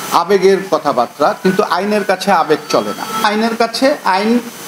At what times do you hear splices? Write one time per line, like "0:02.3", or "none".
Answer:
0:03.2